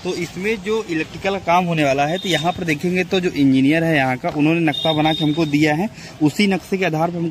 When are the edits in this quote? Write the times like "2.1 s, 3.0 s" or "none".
none